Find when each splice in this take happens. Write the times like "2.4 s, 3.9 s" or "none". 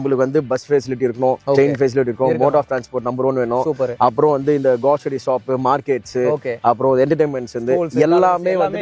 none